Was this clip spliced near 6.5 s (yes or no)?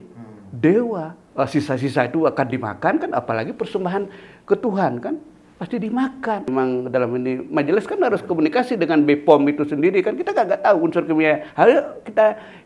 yes